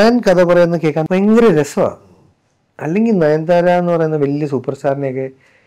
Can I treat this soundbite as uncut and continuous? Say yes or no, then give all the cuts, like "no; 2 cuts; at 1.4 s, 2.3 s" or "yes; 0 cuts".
no; 1 cut; at 1.0 s